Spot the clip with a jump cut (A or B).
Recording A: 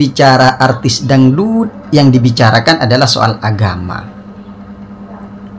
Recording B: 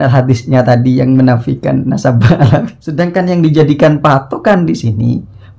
B